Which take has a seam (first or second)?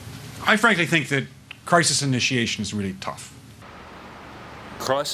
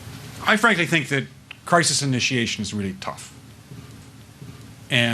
second